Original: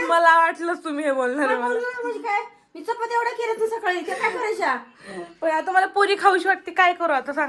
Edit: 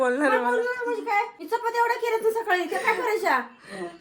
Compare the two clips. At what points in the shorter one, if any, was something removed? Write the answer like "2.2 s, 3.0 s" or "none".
1.4 s